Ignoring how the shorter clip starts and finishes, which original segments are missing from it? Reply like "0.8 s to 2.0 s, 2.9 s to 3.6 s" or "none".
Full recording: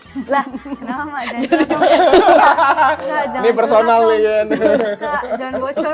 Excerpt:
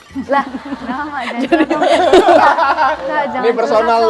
none